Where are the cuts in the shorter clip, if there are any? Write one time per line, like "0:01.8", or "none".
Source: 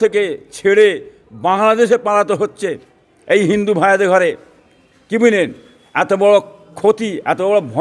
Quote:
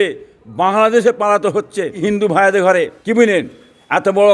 0:02.0
0:03.0